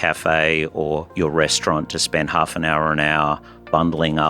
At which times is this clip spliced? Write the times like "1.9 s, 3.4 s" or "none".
1.1 s